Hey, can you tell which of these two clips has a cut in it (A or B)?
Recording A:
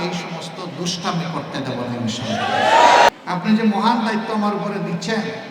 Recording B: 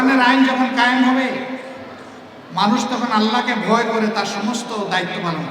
A